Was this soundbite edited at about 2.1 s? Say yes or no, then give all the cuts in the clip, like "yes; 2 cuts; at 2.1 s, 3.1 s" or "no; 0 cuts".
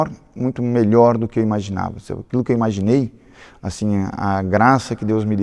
no; 0 cuts